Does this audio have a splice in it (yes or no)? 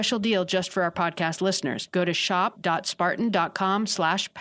yes